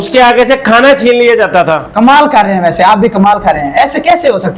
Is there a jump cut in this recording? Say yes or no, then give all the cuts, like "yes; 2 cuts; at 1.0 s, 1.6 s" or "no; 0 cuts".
yes; 1 cut; at 1.8 s